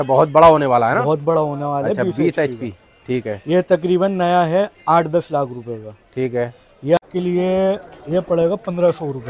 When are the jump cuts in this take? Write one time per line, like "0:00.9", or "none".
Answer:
0:07.0